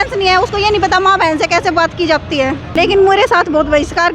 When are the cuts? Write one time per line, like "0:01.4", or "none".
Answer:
0:02.7

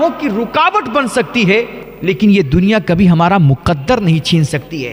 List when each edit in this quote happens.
0:01.8

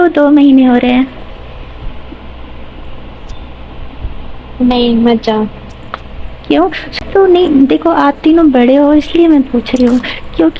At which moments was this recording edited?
0:06.8

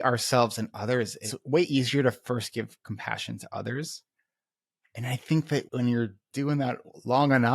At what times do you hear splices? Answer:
0:01.3
0:05.7

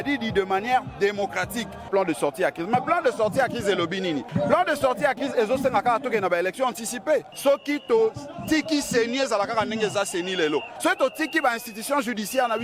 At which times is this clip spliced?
0:01.9
0:04.3
0:07.3
0:10.7

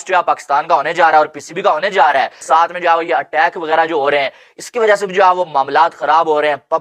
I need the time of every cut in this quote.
0:02.3

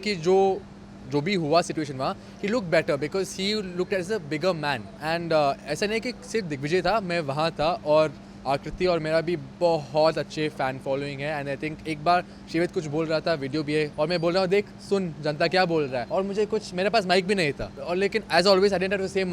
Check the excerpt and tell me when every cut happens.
0:04.9
0:13.9
0:16.0
0:17.7

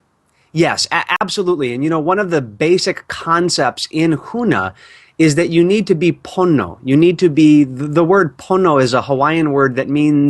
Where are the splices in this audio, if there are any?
0:06.3

